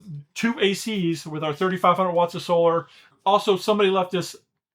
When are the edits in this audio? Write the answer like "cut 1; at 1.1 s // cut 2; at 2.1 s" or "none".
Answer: cut 1; at 3.0 s